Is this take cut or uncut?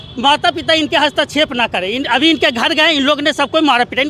uncut